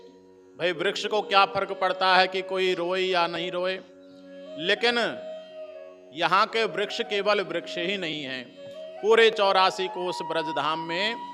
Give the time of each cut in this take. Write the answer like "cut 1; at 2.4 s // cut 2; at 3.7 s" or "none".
none